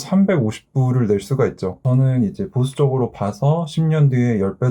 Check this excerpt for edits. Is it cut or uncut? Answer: cut